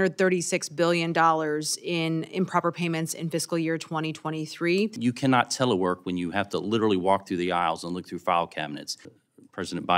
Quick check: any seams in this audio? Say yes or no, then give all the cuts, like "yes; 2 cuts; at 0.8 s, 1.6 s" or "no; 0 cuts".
yes; 2 cuts; at 5.0 s, 9.1 s